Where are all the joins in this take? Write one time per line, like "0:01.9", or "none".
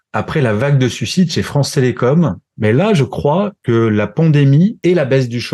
0:02.4
0:03.6
0:04.8